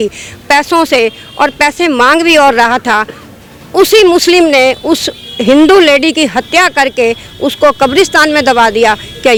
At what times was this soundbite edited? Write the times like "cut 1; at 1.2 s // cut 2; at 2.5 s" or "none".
none